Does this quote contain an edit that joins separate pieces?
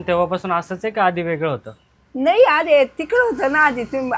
no; 0 cuts

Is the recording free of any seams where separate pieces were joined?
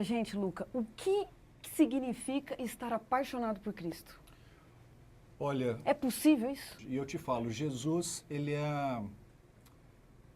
no; 1 cut; at 6.7 s

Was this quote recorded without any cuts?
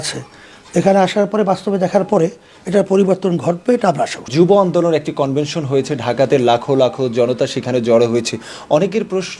yes; 0 cuts

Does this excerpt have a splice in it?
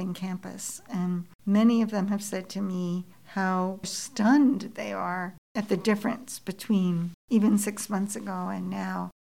no; 0 cuts

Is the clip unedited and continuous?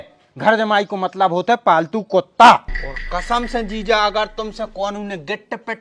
no; 1 cut; at 2.7 s

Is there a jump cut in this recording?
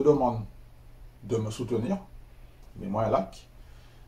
yes; 1 cut; at 2.6 s

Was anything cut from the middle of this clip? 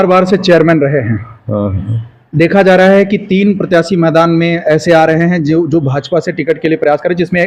no; 0 cuts

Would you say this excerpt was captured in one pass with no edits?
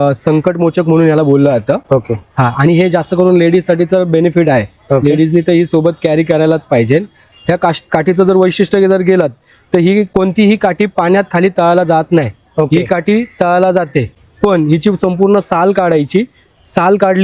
yes; 0 cuts

